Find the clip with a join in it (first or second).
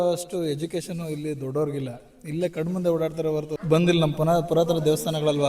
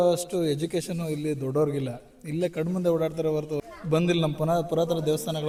first